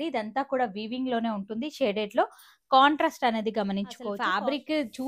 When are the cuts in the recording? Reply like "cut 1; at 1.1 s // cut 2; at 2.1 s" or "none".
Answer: cut 1; at 4.2 s